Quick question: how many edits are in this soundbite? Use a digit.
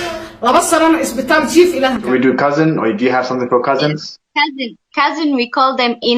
1